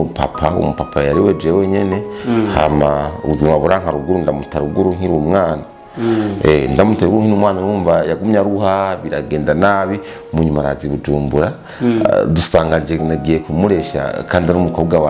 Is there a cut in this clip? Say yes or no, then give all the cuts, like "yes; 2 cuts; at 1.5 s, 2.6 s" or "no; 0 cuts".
no; 0 cuts